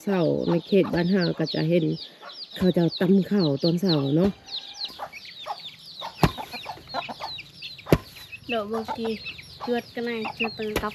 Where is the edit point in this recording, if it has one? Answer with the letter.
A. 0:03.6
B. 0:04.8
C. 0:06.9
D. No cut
B